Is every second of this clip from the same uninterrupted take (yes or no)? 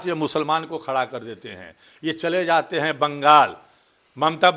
yes